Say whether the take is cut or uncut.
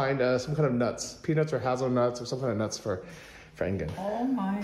uncut